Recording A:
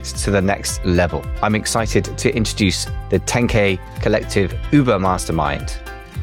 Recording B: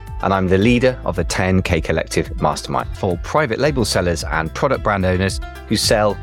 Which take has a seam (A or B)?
B